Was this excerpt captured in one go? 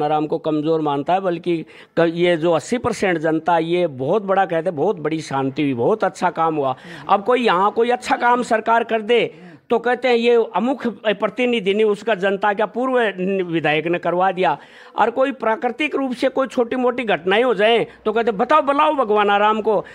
yes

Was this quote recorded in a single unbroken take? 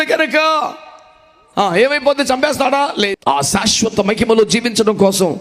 no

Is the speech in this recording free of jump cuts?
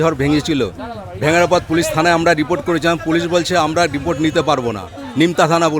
yes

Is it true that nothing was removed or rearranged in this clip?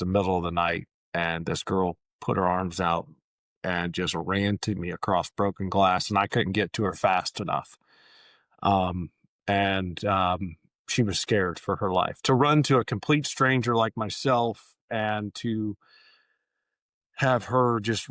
yes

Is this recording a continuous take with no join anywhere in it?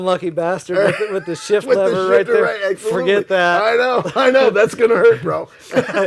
yes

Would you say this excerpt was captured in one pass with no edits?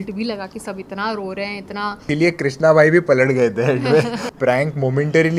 no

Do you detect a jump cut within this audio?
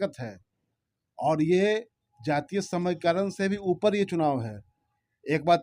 no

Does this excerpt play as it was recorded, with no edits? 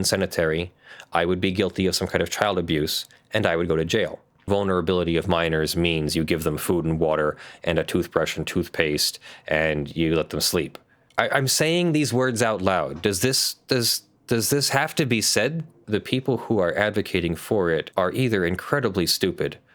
no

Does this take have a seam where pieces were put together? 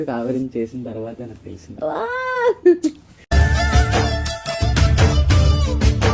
no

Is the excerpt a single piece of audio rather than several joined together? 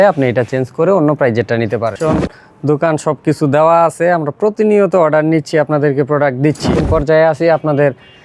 no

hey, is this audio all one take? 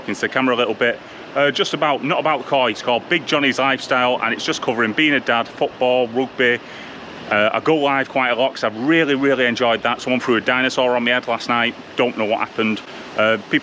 yes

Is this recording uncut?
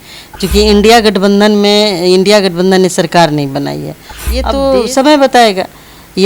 no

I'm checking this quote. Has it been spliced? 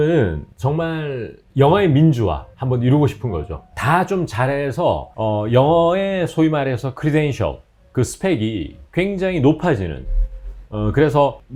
no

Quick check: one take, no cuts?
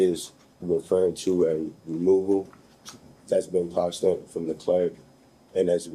yes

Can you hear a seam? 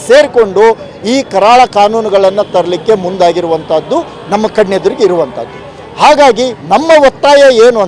no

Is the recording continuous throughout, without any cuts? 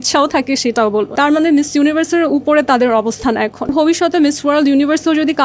no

